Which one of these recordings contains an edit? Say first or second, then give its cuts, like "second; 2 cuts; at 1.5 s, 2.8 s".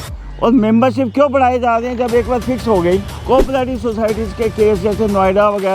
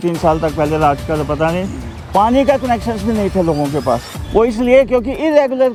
first; 1 cut; at 3.1 s